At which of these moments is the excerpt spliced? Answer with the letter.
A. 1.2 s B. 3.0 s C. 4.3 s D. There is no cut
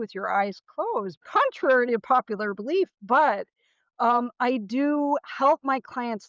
A